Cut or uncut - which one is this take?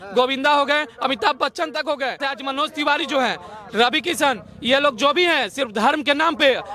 cut